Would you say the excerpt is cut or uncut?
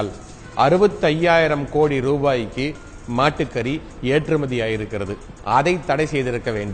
cut